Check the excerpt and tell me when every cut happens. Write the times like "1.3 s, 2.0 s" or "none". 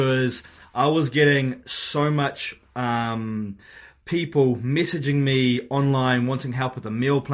none